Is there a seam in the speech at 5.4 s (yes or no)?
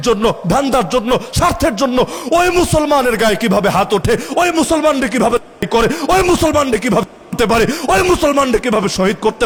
no